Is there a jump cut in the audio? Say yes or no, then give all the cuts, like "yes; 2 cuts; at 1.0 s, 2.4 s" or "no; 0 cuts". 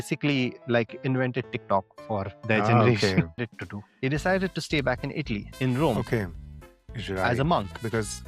yes; 1 cut; at 3.5 s